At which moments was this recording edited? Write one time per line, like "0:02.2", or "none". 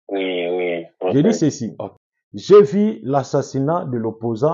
0:01.1